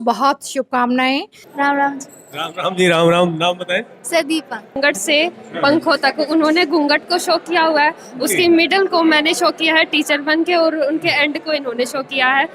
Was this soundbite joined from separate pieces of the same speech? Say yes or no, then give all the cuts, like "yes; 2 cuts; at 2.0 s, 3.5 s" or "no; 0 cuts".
yes; 2 cuts; at 1.4 s, 4.8 s